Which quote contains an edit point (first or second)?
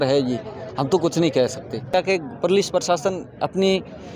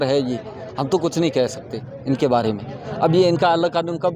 first